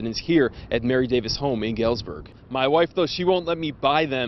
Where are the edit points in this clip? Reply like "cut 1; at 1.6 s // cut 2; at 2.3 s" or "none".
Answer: cut 1; at 2.4 s